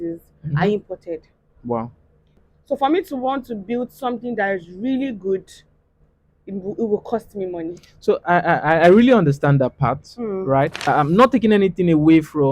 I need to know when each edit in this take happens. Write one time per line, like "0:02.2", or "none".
0:02.5
0:10.8